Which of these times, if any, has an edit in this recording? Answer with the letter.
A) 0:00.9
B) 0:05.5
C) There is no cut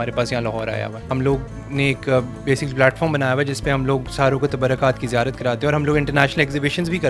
A